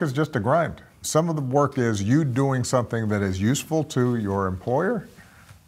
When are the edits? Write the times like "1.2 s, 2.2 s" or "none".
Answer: none